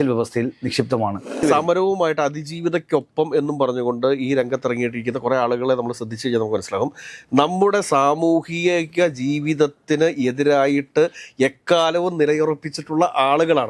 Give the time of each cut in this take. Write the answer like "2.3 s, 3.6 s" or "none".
1.4 s